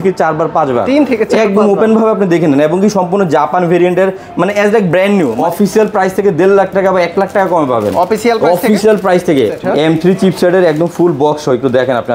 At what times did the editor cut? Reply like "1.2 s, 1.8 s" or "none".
5.3 s, 9.6 s